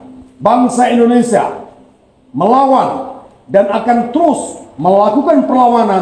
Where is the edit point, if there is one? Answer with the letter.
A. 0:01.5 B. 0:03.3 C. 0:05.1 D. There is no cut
D